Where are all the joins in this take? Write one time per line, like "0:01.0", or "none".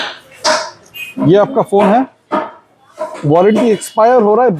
none